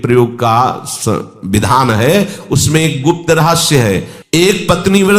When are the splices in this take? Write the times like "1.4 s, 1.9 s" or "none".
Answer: 4.2 s